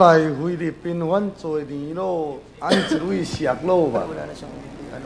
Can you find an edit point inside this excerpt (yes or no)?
no